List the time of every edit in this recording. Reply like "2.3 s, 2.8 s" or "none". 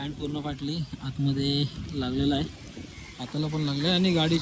none